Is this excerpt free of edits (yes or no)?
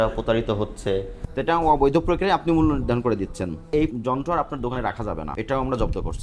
no